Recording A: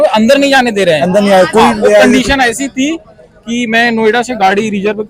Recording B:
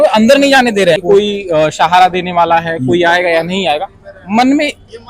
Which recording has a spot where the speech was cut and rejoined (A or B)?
B